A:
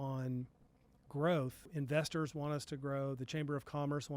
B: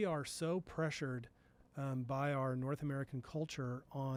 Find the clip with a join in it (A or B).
A